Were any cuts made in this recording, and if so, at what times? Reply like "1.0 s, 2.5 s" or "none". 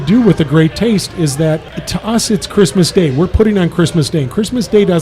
1.7 s